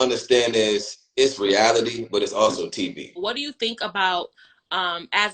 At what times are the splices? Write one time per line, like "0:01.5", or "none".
0:03.1